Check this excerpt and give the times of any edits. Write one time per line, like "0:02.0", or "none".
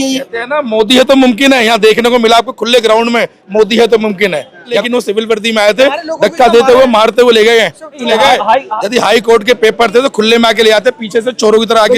0:04.8
0:08.0